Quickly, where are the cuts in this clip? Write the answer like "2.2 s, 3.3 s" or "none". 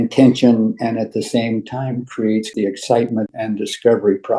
2.4 s